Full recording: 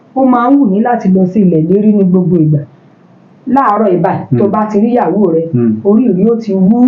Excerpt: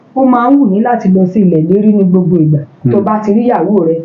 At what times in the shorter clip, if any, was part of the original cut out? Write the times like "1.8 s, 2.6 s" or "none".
2.8 s